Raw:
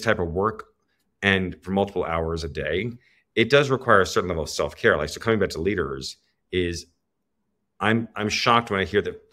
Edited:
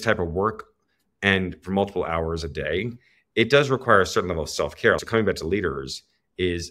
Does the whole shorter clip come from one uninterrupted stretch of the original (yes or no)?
no